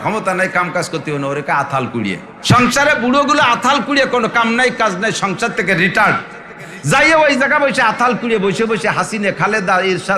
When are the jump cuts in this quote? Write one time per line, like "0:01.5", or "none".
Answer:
0:02.3